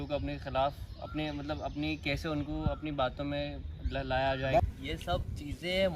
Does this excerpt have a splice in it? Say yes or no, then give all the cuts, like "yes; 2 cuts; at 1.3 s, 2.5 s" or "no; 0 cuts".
yes; 1 cut; at 4.6 s